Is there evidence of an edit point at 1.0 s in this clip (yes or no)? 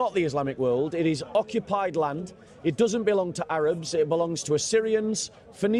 no